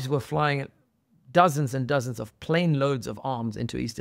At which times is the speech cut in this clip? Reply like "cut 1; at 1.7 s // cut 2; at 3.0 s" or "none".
none